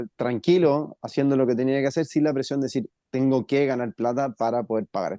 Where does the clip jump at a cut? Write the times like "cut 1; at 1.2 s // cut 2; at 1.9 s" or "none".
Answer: none